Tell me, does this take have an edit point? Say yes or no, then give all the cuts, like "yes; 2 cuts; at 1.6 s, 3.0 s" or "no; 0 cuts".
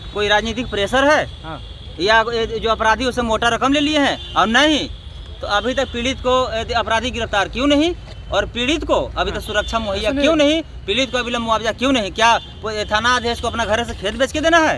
no; 0 cuts